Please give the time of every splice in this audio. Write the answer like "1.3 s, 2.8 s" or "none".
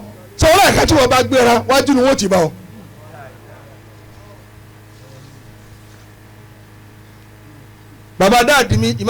7.8 s